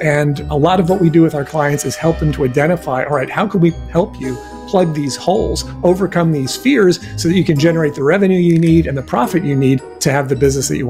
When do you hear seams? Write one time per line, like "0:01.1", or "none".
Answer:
0:09.9